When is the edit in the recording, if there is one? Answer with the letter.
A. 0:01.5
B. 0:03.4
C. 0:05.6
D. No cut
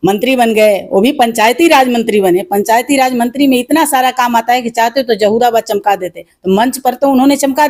D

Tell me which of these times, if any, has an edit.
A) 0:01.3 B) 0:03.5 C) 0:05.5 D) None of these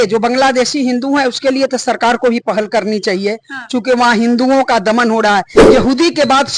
C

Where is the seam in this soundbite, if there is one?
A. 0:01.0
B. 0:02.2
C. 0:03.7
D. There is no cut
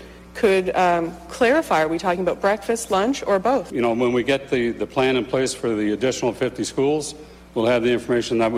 C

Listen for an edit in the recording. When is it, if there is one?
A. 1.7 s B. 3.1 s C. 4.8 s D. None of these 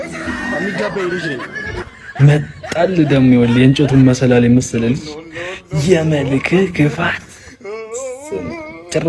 A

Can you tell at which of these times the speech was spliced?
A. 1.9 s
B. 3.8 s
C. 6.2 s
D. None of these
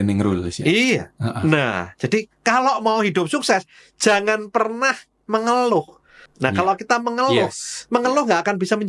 C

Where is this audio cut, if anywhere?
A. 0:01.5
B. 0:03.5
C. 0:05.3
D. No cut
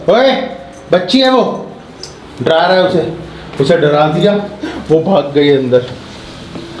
D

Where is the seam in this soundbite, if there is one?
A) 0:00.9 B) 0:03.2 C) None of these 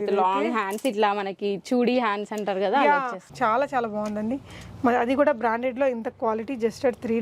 B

